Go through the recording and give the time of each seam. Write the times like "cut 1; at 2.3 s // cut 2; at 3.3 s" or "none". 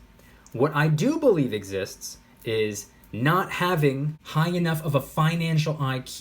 cut 1; at 4.2 s